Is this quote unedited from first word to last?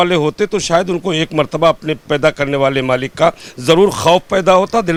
yes; 0 cuts

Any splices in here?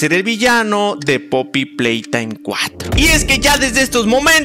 yes; 1 cut; at 2.8 s

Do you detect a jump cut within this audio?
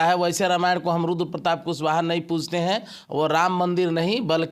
no; 0 cuts

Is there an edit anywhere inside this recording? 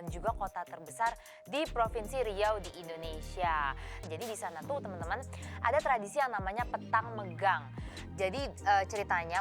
yes; 1 cut; at 4.0 s

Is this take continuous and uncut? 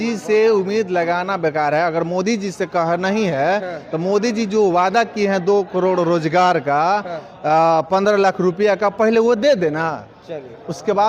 yes; 0 cuts

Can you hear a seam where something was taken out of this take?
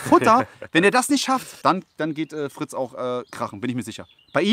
yes; 1 cut; at 1.5 s

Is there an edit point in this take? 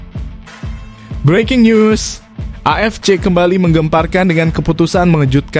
yes; 1 cut; at 1.2 s

